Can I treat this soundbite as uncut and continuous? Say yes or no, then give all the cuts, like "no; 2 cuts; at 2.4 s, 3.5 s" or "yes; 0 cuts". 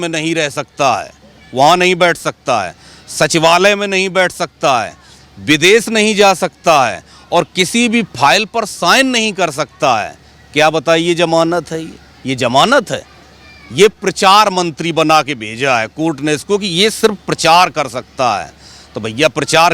yes; 0 cuts